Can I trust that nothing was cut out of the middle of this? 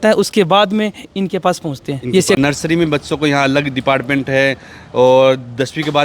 no; 1 cut; at 2.4 s

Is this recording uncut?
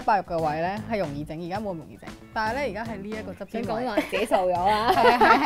yes; 0 cuts

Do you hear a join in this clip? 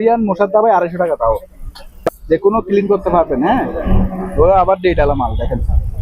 no; 0 cuts

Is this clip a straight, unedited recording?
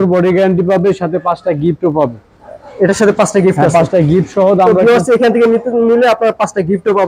yes; 0 cuts

